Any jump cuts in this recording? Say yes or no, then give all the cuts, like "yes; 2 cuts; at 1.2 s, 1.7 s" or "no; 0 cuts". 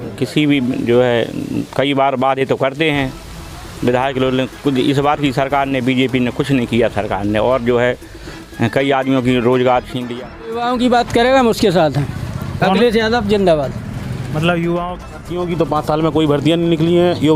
yes; 2 cuts; at 10.0 s, 15.1 s